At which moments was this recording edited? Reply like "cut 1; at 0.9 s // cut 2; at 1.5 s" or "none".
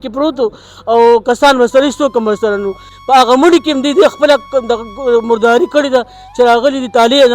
cut 1; at 2.9 s